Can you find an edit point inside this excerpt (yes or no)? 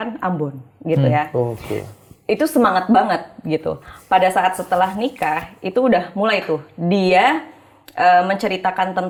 no